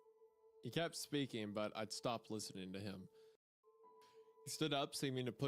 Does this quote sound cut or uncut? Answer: cut